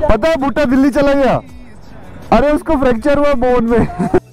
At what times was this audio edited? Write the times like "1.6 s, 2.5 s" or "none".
none

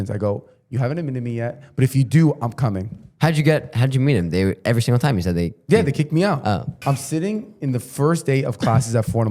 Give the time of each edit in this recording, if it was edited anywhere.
6.7 s

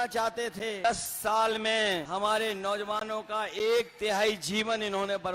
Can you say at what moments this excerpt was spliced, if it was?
0.8 s, 2.1 s

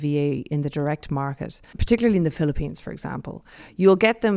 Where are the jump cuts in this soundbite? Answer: 1.7 s

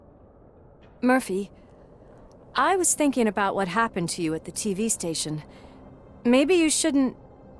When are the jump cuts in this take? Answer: none

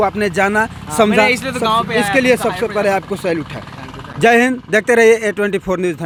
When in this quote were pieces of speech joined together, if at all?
none

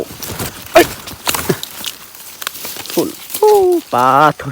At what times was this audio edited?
3.2 s

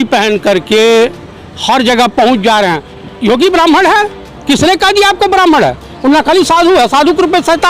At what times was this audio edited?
2.9 s

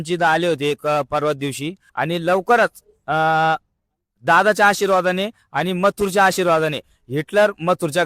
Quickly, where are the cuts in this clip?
1.8 s

